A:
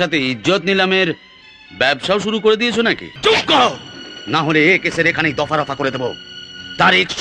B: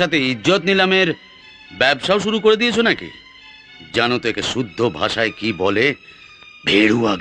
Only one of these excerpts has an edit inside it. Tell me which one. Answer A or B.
A